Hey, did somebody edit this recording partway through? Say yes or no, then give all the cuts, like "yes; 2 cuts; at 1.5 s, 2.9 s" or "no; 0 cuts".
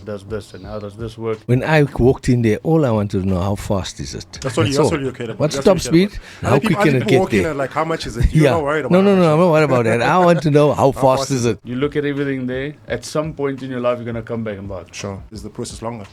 yes; 3 cuts; at 1.4 s, 11.7 s, 15.3 s